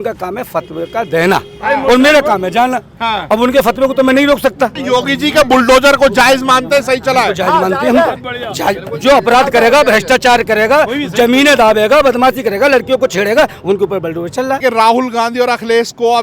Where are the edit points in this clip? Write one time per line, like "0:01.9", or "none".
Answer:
0:04.8
0:14.6